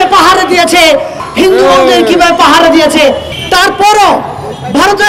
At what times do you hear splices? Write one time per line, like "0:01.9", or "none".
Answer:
0:01.2
0:03.3